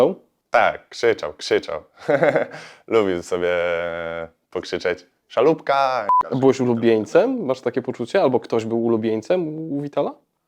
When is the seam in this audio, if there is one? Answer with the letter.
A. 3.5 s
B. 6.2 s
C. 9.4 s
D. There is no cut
B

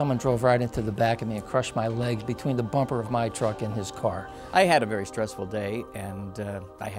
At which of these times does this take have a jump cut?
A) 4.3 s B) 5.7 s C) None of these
A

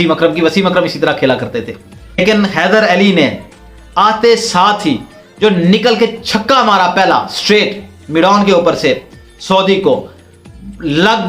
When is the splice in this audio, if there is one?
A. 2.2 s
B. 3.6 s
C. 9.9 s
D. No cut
A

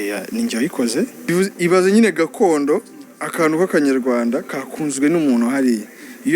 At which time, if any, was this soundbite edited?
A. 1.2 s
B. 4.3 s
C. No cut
A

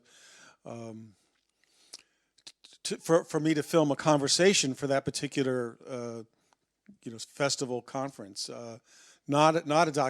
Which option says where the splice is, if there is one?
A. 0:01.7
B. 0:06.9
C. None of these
C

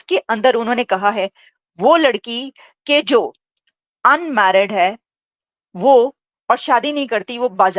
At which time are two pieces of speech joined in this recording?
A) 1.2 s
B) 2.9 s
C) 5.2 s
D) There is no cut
D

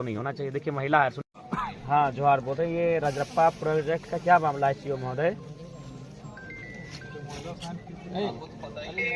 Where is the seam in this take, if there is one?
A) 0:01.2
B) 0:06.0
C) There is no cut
A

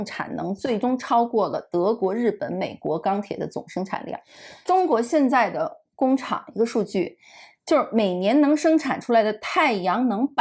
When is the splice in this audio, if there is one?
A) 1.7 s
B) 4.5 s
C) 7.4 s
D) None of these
B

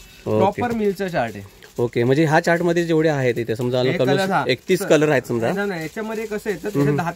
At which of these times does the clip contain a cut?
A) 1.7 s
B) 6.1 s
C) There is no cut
C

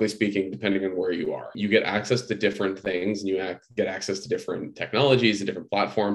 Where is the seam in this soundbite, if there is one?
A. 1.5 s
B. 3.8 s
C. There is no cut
A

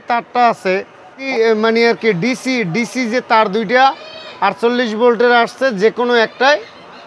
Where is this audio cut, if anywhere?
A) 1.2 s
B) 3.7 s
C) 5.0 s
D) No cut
A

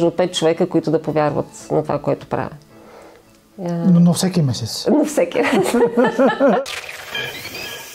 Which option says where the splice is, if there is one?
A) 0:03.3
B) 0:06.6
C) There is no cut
B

